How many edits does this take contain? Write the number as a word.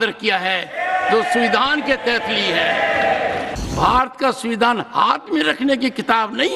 one